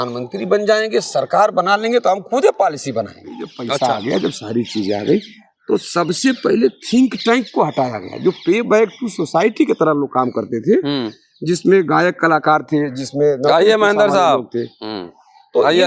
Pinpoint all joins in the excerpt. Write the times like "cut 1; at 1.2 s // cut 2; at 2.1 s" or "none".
cut 1; at 3.6 s